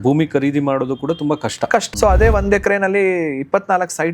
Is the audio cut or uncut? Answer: cut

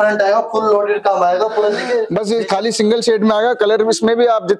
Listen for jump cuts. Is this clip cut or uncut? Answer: cut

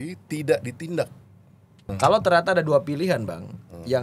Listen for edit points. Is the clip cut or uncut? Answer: cut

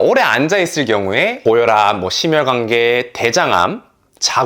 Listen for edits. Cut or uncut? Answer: cut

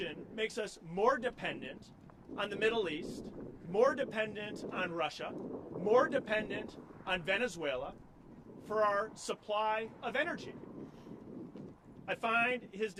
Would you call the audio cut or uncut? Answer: uncut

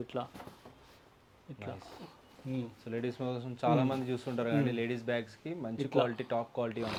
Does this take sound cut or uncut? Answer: uncut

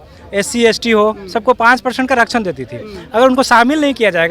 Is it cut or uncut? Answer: uncut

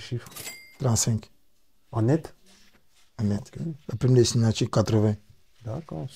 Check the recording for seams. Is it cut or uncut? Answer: uncut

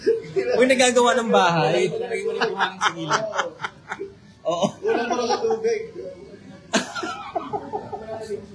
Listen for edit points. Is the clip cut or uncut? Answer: uncut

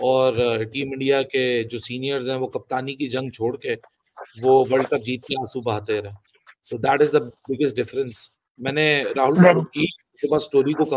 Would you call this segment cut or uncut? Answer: uncut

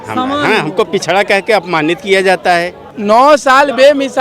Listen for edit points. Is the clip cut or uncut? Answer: cut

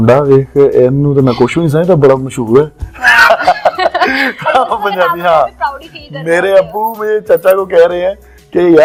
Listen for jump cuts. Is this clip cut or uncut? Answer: uncut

